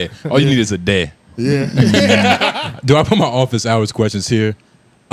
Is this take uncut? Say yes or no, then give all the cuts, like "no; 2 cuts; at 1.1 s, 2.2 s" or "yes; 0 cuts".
no; 1 cut; at 2.6 s